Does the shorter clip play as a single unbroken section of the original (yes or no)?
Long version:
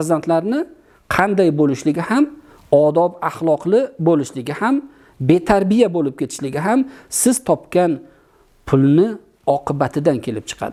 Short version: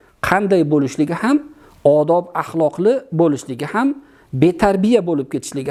yes